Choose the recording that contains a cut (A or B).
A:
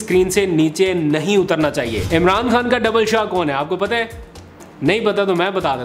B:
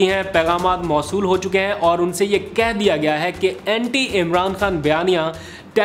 A